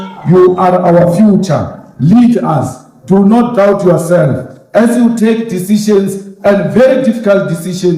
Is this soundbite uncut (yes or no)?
yes